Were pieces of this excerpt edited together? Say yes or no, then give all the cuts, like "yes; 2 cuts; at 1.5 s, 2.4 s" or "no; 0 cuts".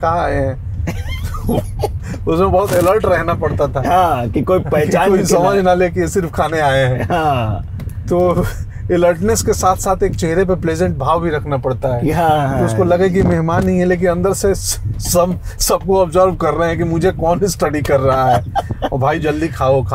no; 0 cuts